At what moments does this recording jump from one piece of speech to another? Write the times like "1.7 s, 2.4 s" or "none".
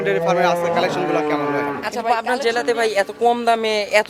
1.9 s